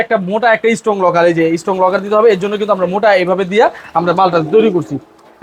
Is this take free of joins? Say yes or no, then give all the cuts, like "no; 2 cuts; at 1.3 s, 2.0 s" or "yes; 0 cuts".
yes; 0 cuts